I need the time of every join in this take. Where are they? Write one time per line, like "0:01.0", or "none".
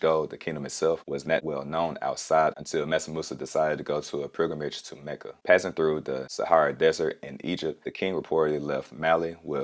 0:01.0